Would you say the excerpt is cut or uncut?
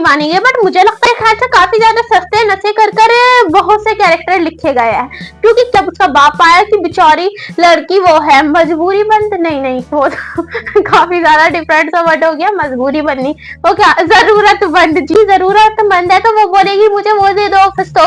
cut